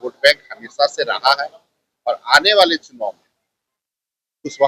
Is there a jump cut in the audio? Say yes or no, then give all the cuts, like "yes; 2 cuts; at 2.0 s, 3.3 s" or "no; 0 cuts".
no; 0 cuts